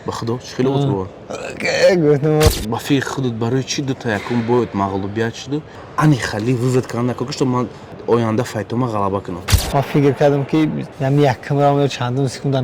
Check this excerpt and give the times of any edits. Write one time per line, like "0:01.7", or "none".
0:02.5
0:05.8
0:09.5
0:10.9